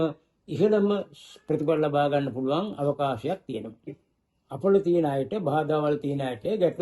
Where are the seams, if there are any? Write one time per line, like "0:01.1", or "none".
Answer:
0:04.1